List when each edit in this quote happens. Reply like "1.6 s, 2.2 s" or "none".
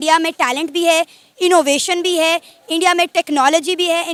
none